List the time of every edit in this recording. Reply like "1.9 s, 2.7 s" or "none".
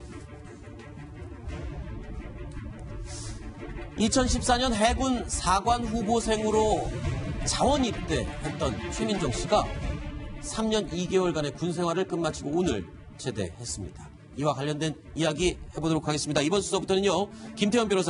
none